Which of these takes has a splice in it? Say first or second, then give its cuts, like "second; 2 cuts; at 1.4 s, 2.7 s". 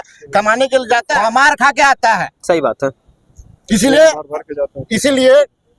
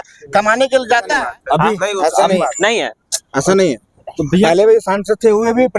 second; 1 cut; at 1.1 s